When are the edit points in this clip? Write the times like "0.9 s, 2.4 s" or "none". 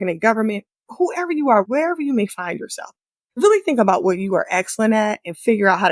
3.4 s

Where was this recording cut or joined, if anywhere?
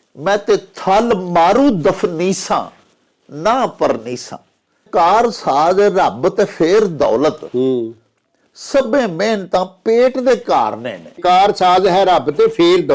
4.9 s, 11.2 s

